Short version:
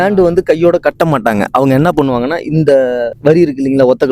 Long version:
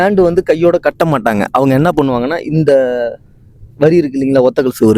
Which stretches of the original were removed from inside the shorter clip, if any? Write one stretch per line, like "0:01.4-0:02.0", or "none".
0:03.1-0:03.7